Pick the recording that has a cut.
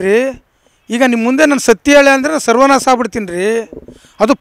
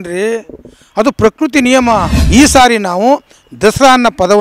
second; 1 cut; at 2.2 s

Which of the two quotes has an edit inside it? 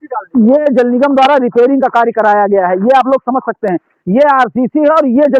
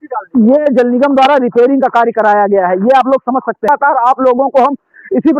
second; 1 cut; at 3.6 s

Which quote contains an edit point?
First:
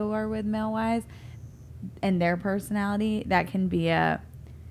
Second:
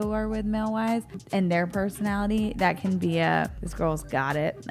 second; 2 cuts; at 1.2 s, 3.6 s

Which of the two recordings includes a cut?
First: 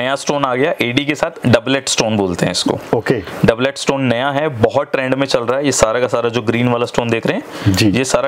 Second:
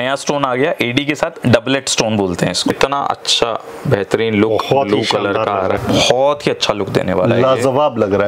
second; 2 cuts; at 2.7 s, 5.8 s

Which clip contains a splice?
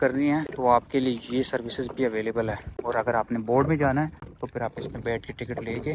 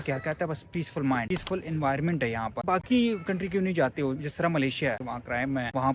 second; 2 cuts; at 2.6 s, 5.0 s

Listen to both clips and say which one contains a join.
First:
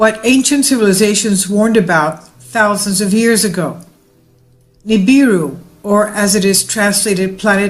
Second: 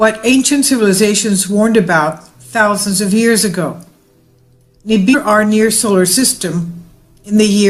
first; 1 cut; at 5.1 s

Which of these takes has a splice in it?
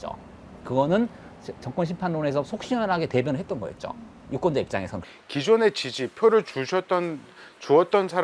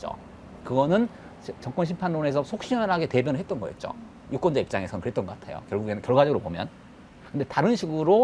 first; 1 cut; at 5.0 s

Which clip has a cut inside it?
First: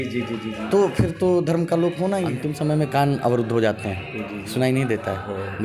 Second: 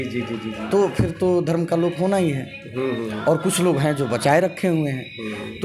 first; 1 cut; at 2.4 s

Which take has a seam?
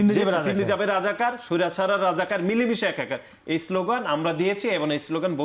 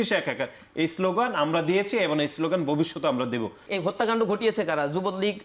second; 1 cut; at 3.7 s

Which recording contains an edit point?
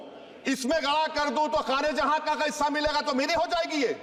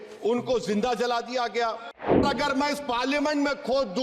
second; 1 cut; at 2.2 s

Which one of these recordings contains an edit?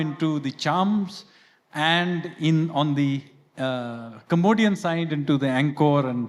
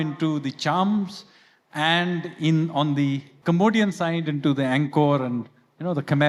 second; 1 cut; at 3.3 s

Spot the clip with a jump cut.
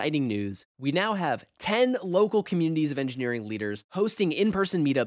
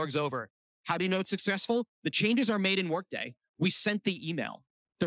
second; 1 cut; at 1.9 s

